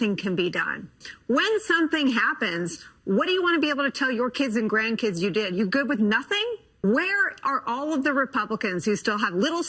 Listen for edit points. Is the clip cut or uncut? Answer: cut